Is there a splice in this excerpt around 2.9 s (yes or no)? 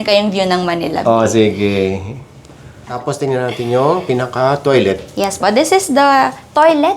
yes